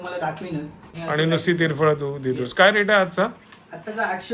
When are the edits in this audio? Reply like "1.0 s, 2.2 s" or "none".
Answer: 0.9 s

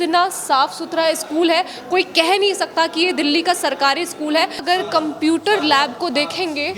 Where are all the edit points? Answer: 4.6 s

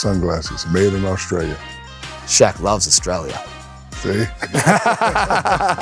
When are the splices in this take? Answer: none

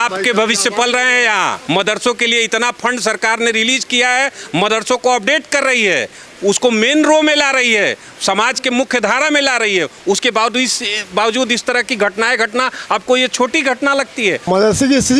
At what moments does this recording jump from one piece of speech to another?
1.6 s, 14.4 s

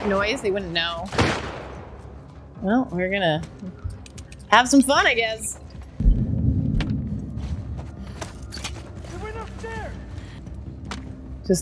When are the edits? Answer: 5.9 s, 10.4 s

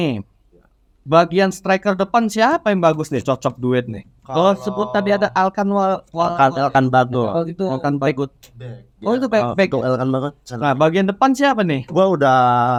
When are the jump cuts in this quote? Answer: none

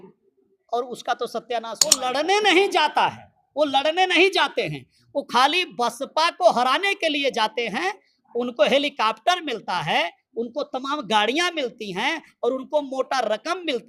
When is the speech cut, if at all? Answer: 2.0 s

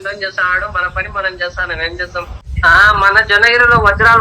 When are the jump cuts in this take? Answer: 2.5 s

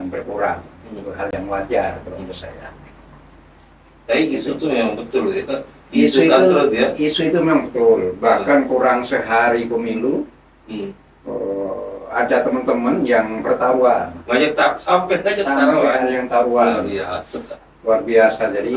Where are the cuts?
none

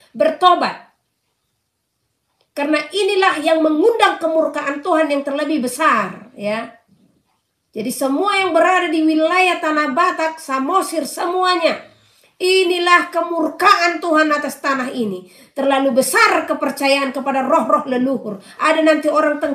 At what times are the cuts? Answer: none

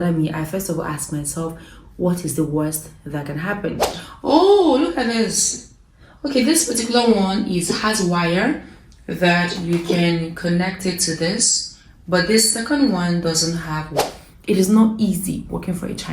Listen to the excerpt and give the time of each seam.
3.9 s, 14.1 s

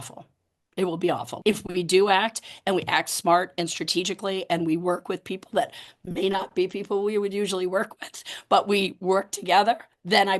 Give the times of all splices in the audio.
1.3 s

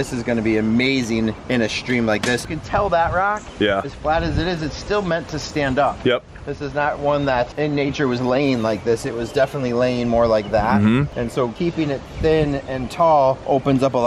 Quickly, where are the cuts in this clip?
2.5 s

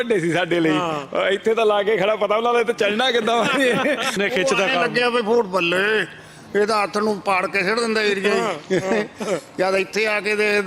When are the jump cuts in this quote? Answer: 4.2 s

